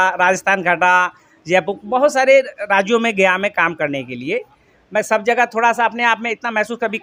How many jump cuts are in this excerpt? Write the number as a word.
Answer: zero